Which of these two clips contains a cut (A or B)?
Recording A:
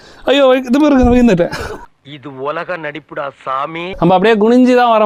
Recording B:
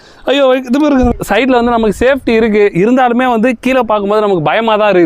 B